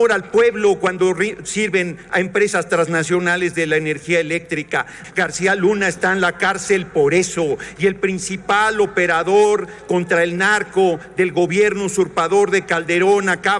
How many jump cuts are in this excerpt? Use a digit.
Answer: 1